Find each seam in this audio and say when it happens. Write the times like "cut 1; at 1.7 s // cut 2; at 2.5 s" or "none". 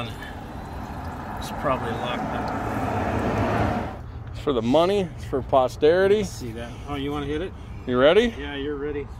cut 1; at 4.0 s

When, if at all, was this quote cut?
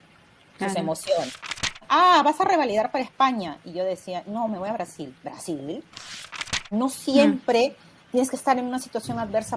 cut 1; at 1.8 s // cut 2; at 6.4 s

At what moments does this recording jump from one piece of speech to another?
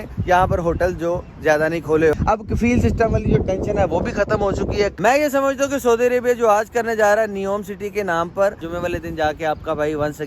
cut 1; at 2.1 s // cut 2; at 4.9 s // cut 3; at 8.7 s

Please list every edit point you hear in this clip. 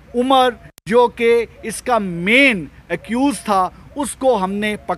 none

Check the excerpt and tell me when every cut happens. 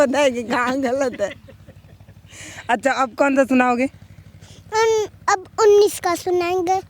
none

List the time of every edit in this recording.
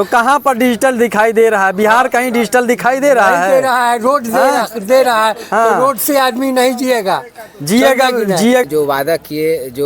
cut 1; at 8.6 s

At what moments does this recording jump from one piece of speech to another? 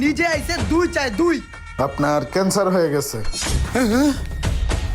cut 1; at 1.6 s

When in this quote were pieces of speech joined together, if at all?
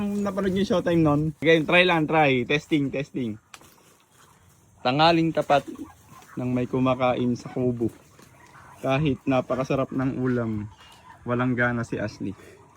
cut 1; at 1.4 s

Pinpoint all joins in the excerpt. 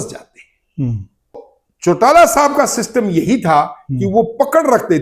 cut 1; at 1.4 s

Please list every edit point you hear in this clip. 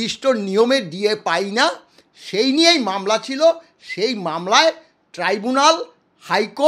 none

